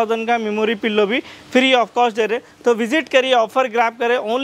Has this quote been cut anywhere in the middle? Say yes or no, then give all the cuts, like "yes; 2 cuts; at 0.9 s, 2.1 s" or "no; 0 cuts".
no; 0 cuts